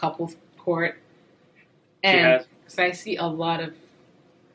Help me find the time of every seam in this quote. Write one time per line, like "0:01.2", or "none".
0:02.6